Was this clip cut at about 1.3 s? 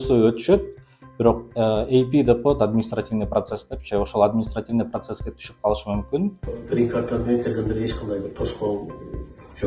no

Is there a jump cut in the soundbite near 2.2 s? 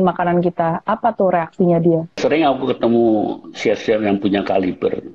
yes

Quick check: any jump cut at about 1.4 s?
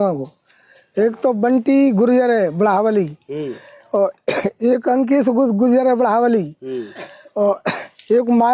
no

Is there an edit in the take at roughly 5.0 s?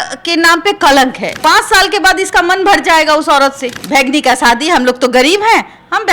no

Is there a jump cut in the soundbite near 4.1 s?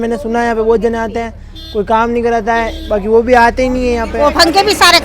yes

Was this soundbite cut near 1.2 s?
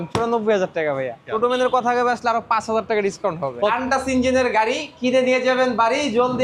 yes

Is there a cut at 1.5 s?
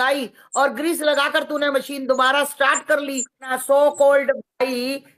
no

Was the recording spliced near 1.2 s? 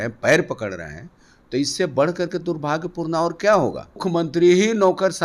no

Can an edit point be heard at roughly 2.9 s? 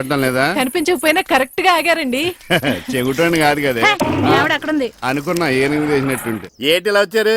no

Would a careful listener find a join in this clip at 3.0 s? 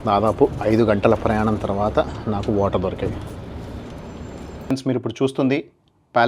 no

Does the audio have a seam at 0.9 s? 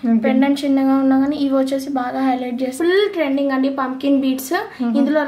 no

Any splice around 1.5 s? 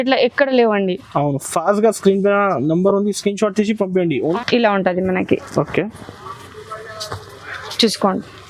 no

